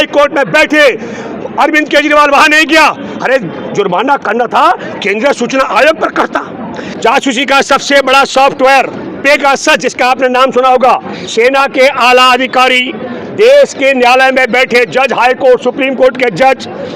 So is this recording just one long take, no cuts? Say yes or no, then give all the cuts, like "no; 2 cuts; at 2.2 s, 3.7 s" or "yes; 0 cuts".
no; 1 cut; at 6.8 s